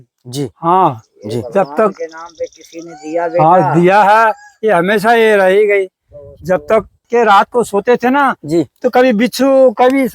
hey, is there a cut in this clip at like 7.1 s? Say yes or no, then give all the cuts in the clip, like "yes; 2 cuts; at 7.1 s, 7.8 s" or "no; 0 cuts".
yes; 1 cut; at 7.1 s